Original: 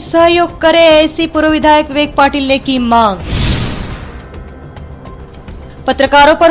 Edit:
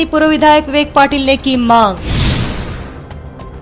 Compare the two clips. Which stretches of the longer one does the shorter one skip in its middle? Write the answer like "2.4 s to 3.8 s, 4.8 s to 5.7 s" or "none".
3.9 s to 4.3 s